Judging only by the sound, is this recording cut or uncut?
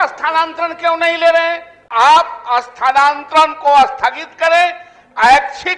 cut